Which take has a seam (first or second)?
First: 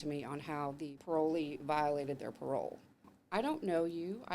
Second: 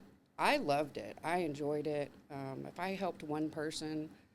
first